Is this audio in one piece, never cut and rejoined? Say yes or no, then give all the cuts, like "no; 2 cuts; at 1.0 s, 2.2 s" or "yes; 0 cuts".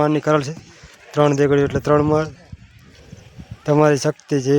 yes; 0 cuts